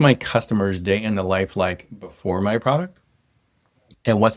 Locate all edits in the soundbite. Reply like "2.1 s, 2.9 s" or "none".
none